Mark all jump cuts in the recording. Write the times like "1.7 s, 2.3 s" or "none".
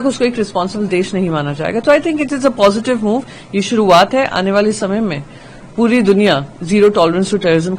none